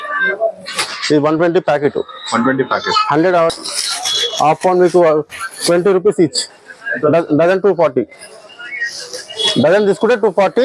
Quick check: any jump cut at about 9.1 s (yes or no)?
no